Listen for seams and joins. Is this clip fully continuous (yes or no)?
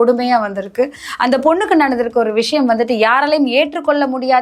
yes